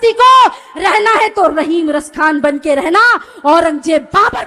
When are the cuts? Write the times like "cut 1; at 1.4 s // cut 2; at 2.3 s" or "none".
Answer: none